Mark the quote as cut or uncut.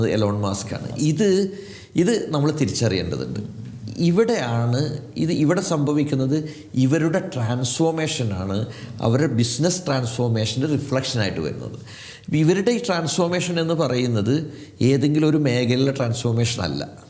uncut